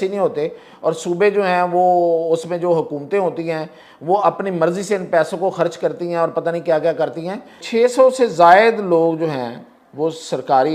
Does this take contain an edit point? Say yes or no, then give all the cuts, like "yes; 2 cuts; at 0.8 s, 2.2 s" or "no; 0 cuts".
yes; 1 cut; at 7.6 s